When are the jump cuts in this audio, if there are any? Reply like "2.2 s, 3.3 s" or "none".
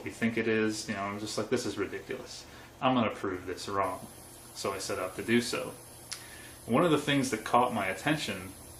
none